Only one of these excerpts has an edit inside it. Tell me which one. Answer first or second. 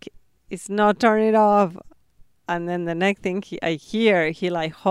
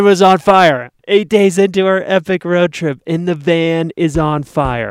second